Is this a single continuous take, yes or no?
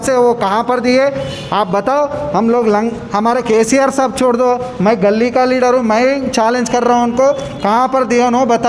yes